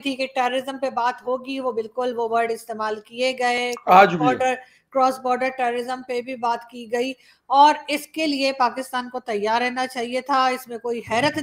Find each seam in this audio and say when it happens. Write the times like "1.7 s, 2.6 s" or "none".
none